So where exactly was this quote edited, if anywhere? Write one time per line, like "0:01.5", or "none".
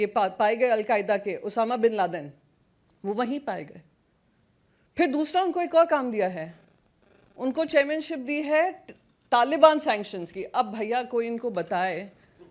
none

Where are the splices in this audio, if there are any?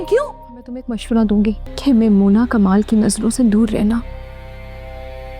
0:00.9
0:01.7

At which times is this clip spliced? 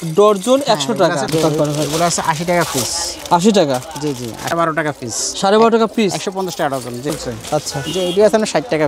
0:01.3
0:04.5
0:07.1

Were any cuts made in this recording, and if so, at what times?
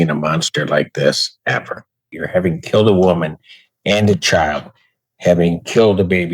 0:02.1

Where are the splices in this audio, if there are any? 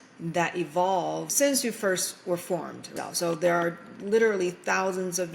0:01.3
0:02.9

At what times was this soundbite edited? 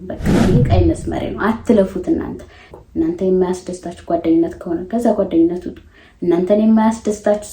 0:02.7

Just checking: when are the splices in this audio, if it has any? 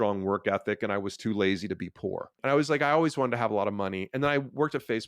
0:02.3

